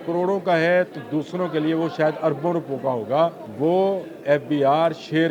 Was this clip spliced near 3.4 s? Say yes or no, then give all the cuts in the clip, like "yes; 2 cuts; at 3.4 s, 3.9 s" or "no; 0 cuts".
yes; 1 cut; at 3.4 s